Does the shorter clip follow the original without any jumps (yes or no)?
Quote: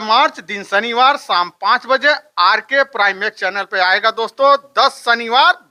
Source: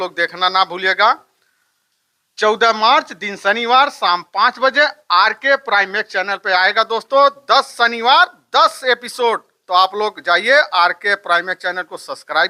yes